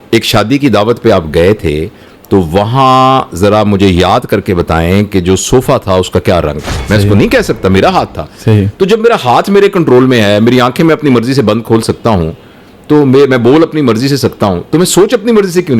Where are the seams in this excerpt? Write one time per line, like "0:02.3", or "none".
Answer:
0:06.7